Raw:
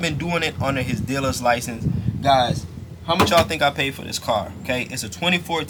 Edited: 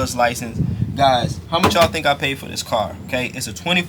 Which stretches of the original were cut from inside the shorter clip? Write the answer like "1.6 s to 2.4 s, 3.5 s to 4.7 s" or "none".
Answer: 2.6 s to 2.9 s